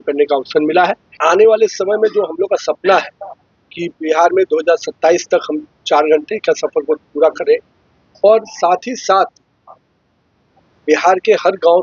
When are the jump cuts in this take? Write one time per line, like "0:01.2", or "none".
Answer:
0:01.2